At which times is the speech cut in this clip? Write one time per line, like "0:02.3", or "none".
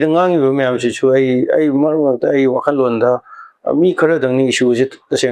none